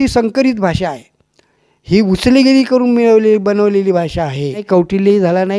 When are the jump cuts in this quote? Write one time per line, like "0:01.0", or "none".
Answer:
0:04.6